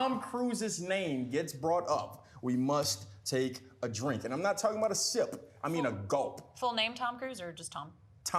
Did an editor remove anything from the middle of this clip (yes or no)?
no